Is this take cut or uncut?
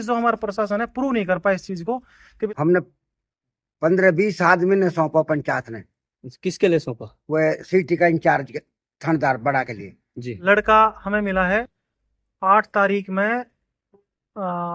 cut